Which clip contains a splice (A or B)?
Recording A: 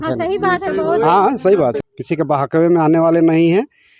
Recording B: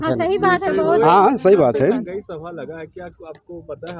A